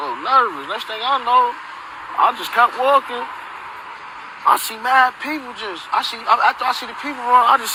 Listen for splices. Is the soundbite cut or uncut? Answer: uncut